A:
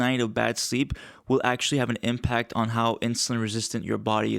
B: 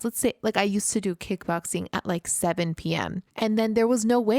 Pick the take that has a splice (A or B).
B